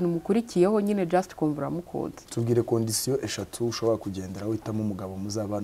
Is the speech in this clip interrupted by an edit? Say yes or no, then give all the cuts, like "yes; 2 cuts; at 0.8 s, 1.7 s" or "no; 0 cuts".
yes; 1 cut; at 2.2 s